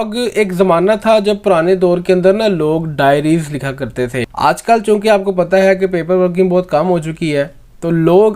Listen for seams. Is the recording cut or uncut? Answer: cut